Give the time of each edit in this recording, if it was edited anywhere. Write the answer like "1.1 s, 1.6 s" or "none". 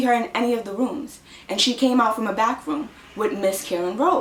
none